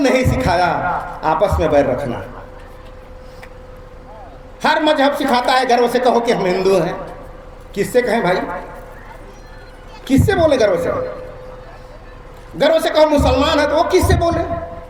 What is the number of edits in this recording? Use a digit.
0